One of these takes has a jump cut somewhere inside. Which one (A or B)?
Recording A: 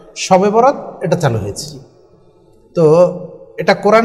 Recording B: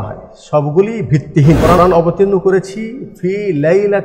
B